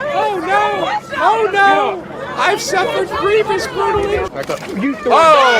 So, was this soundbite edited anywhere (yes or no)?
yes